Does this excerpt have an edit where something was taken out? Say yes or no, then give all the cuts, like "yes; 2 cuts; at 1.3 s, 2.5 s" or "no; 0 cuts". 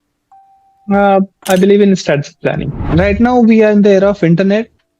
yes; 1 cut; at 2.7 s